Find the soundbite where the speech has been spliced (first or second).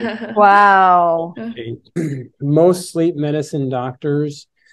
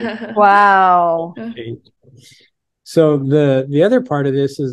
first